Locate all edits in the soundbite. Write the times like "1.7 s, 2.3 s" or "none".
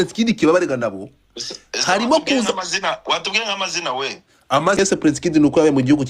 4.8 s